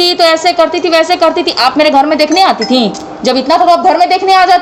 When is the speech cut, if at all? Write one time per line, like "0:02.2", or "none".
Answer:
none

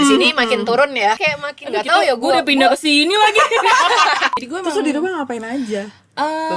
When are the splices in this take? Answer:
0:01.2
0:04.4

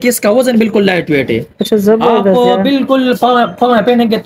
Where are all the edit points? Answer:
none

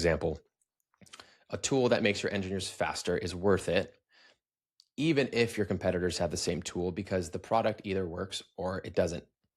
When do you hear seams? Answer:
none

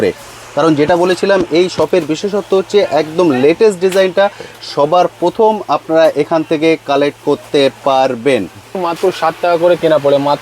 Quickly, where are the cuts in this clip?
0:08.8

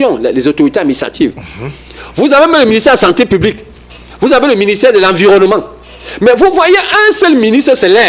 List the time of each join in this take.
none

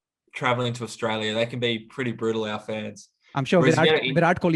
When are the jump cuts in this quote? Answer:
none

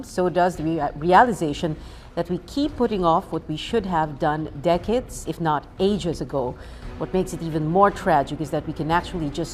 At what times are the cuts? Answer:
0:07.1

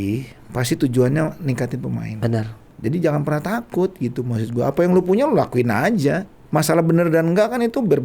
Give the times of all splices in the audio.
0:02.6
0:06.3

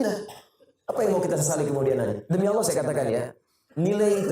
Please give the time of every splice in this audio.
0:02.2

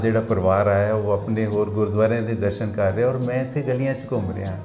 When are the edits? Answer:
none

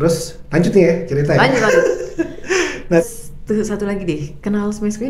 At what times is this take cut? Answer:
0:03.0

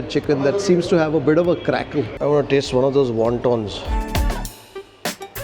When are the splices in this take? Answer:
0:02.1

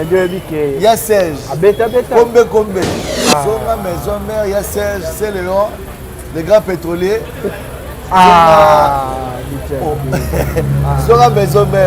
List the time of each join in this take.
0:03.0

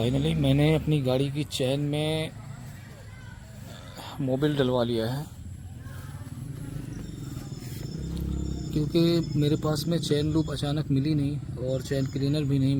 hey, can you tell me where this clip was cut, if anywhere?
none

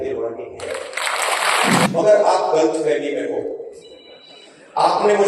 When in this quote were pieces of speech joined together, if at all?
0:01.9

